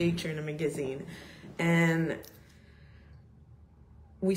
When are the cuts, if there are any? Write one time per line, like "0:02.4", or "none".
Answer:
none